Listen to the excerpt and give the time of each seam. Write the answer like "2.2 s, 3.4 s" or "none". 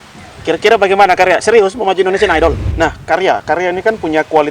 2.7 s